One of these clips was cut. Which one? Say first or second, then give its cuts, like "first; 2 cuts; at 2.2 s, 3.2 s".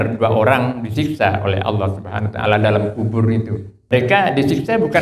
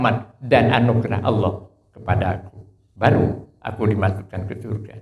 first; 1 cut; at 3.9 s